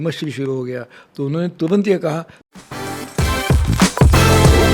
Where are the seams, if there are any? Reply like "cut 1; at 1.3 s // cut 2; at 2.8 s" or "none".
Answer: cut 1; at 2.4 s